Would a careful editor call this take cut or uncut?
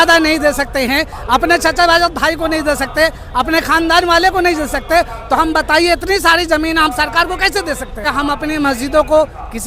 cut